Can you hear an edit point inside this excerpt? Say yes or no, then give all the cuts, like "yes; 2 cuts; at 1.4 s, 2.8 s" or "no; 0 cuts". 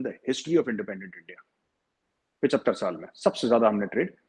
no; 0 cuts